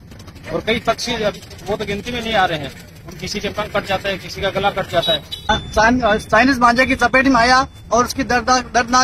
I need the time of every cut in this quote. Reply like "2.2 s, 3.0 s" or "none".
5.5 s